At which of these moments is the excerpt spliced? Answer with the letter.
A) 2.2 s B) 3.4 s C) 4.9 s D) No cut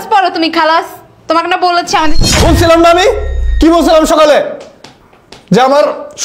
A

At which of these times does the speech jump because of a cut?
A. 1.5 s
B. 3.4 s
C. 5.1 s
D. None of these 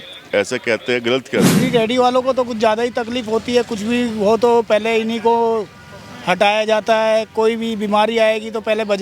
A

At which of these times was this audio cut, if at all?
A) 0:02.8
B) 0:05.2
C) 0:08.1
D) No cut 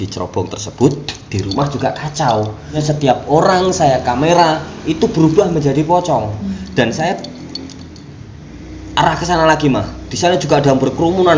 A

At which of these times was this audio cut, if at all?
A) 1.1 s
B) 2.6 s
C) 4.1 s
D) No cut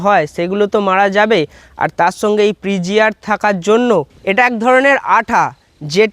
C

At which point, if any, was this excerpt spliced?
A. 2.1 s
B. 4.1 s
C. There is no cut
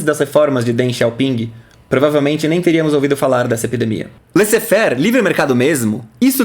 B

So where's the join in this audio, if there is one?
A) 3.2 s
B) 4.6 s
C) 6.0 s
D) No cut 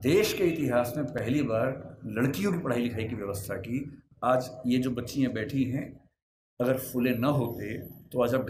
D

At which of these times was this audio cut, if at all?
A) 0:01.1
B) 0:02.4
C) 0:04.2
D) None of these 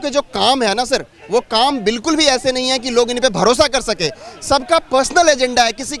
D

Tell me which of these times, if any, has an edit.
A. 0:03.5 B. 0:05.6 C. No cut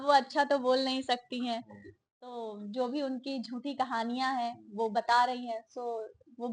C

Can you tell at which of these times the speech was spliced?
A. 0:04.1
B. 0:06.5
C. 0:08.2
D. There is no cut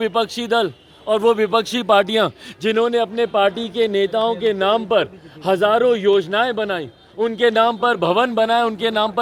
D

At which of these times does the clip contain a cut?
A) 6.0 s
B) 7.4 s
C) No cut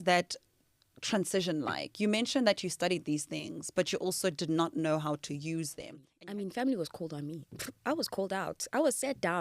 A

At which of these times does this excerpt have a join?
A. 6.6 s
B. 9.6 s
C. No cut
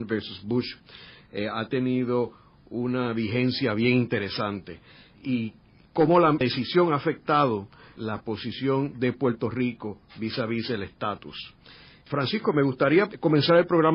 A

